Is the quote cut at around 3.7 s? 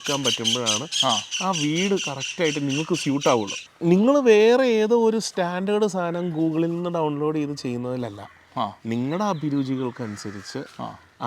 yes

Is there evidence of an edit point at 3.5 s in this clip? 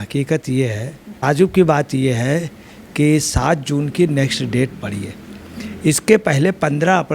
no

